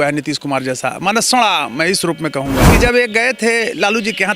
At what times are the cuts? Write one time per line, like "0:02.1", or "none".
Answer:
0:02.7